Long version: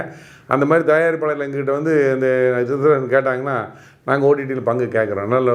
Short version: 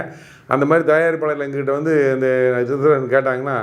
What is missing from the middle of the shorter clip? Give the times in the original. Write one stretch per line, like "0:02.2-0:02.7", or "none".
none